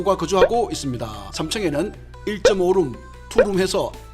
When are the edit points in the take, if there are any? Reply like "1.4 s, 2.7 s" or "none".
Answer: 1.2 s